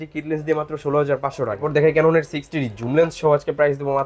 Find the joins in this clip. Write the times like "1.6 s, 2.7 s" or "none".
1.6 s